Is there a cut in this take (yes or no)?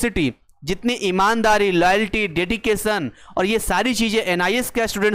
no